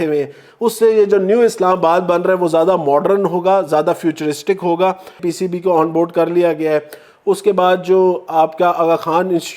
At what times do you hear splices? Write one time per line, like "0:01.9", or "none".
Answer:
0:05.2